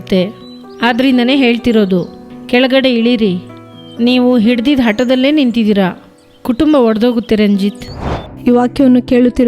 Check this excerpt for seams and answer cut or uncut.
cut